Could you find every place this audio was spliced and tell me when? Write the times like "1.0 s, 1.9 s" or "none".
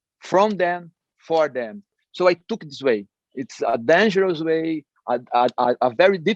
2.0 s